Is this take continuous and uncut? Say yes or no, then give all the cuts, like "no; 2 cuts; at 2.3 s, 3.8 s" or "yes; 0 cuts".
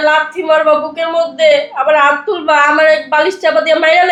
yes; 0 cuts